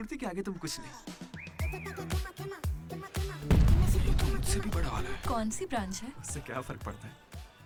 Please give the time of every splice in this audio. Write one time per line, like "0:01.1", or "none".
none